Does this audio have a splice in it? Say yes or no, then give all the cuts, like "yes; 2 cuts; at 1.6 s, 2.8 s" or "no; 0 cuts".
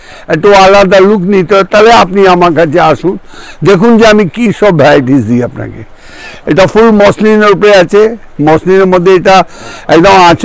no; 0 cuts